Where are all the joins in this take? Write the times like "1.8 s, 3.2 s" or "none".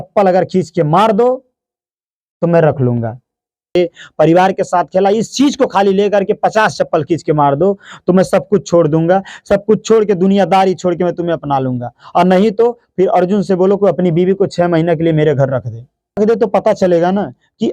3.8 s, 16.2 s